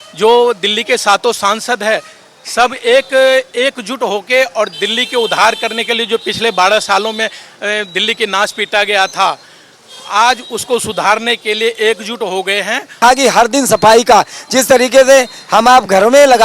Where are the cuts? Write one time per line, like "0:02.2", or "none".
0:13.0